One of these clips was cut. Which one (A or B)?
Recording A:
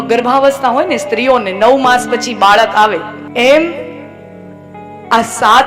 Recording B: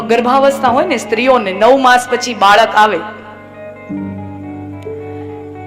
A